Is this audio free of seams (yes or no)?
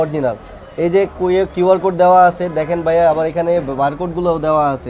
yes